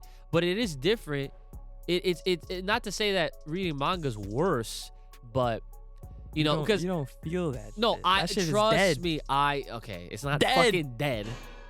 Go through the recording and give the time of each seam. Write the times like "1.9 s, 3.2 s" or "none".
none